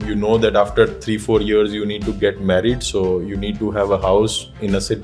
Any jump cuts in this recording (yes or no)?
no